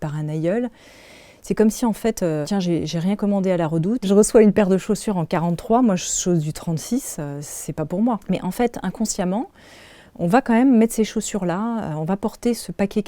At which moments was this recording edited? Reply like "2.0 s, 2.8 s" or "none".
2.5 s, 4.0 s, 8.2 s